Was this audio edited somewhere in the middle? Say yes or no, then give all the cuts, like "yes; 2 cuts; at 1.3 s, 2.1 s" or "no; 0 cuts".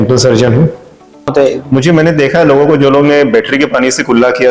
yes; 1 cut; at 1.3 s